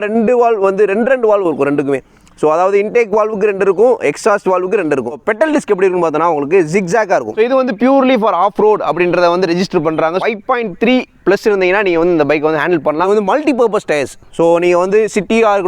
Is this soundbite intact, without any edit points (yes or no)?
no